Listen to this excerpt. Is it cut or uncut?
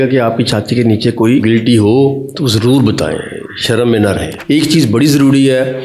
cut